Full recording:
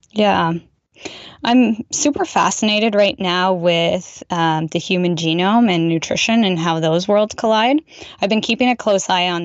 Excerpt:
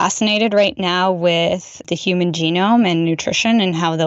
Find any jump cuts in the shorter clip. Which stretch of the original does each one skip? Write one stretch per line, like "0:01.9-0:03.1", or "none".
0:04.2-0:04.7